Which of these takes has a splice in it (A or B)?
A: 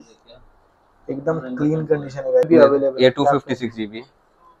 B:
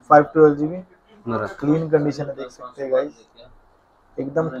A